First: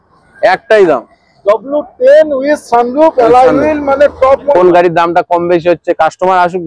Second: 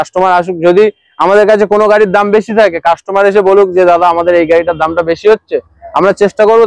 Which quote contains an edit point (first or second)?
first